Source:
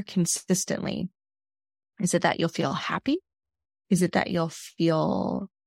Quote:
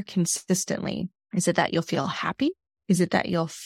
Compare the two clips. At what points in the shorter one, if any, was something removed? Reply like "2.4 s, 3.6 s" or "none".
1.2 s, 2.7 s